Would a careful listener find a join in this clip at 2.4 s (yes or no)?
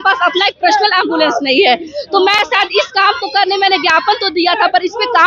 no